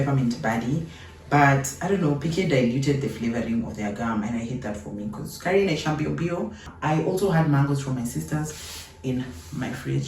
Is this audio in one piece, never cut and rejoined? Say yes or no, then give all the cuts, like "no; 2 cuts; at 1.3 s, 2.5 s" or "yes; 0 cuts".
no; 1 cut; at 6.7 s